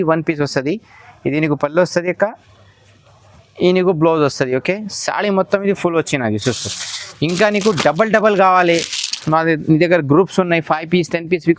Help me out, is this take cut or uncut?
uncut